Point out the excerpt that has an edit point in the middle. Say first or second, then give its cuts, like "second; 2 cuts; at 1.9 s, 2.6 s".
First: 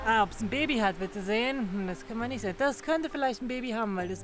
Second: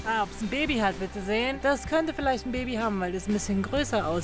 second; 1 cut; at 1.6 s